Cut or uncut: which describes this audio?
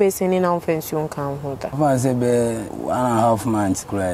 cut